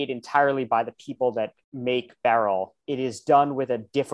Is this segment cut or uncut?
cut